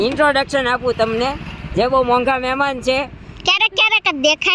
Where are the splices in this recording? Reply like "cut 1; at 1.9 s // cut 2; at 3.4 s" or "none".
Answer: none